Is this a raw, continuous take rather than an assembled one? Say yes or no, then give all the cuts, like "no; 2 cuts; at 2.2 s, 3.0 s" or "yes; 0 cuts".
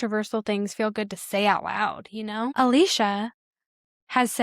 no; 1 cut; at 2.5 s